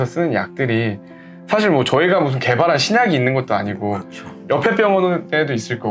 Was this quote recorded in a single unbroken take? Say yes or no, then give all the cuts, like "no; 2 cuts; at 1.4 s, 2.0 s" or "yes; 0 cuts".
yes; 0 cuts